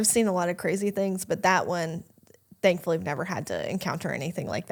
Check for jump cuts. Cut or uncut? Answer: uncut